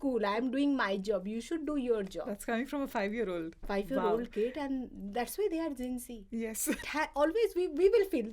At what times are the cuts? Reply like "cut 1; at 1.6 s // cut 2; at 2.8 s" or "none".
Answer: cut 1; at 6.8 s